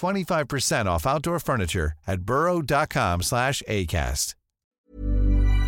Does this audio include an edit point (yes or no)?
yes